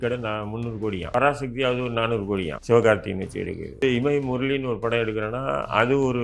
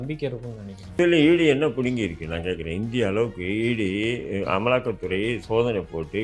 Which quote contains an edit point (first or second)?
first